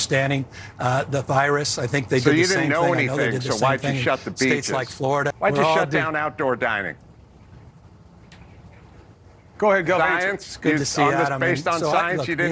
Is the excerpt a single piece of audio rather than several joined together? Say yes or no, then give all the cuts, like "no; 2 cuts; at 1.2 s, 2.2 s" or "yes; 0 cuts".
no; 1 cut; at 5.3 s